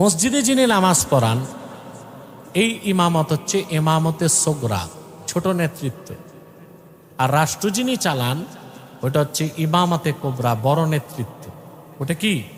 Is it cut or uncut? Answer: uncut